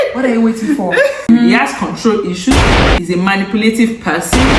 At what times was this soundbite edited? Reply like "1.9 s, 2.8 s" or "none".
1.3 s